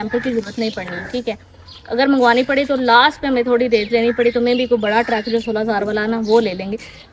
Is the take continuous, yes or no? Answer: yes